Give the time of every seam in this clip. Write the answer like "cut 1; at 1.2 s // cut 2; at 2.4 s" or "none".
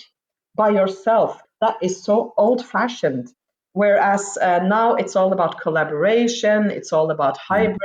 cut 1; at 1.4 s